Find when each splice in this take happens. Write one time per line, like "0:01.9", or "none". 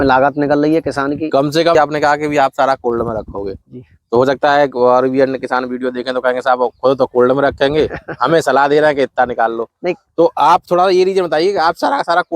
0:01.7